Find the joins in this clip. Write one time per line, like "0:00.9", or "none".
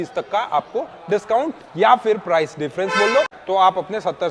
0:03.4